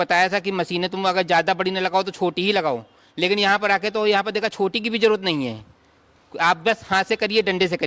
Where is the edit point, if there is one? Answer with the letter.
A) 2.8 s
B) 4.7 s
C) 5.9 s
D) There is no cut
D